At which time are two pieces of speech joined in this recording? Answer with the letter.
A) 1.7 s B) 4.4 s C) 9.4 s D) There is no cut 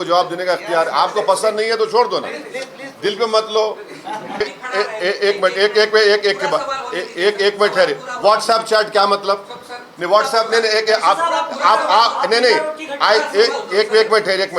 B